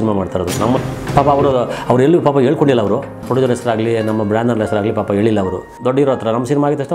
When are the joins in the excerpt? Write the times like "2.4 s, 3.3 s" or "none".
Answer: 0.8 s, 3.2 s, 5.7 s